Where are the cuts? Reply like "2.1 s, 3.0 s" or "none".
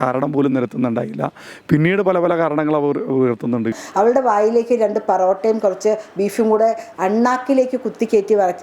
3.7 s